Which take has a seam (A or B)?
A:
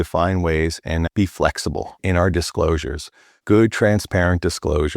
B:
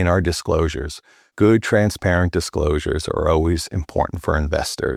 A